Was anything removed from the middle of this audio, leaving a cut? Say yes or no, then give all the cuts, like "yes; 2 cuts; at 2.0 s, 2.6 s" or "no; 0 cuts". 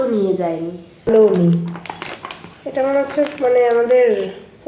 yes; 1 cut; at 1.1 s